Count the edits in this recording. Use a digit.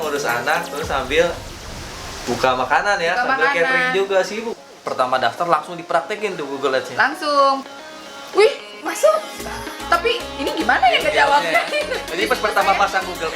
2